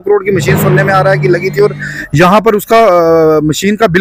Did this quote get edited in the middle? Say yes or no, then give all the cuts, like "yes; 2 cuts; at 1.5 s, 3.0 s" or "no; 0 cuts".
no; 0 cuts